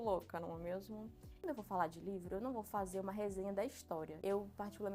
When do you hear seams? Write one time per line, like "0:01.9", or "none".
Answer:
0:01.4
0:04.2